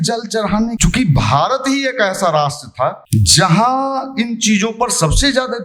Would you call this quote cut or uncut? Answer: cut